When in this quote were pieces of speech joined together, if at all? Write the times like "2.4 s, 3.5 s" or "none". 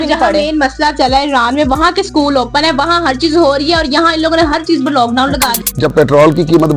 5.5 s